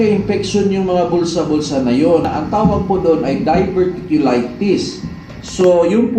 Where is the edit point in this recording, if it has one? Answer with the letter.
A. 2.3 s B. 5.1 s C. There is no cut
A